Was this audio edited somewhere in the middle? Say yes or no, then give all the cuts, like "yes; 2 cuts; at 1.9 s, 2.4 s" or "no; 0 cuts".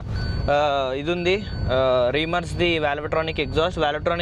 no; 0 cuts